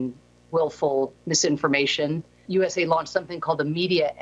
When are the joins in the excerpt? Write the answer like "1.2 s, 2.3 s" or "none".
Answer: 2.4 s